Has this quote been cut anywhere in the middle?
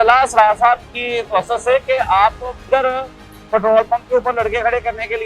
yes; 1 cut; at 2.7 s

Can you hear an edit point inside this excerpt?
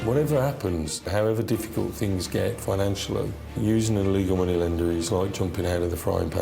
yes; 2 cuts; at 1.1 s, 3.5 s

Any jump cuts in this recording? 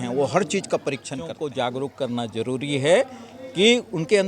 yes; 1 cut; at 1.3 s

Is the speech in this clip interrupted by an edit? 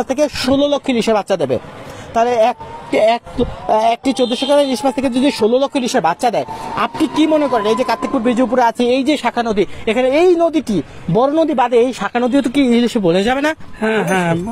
no; 0 cuts

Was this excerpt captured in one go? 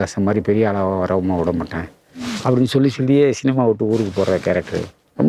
yes; 0 cuts

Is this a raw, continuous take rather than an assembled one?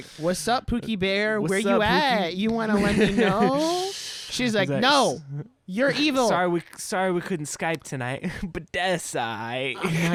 yes; 0 cuts

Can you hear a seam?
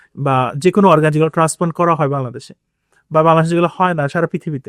no; 0 cuts

